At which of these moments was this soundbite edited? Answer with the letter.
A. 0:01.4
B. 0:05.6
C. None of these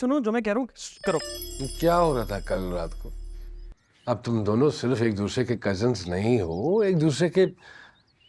A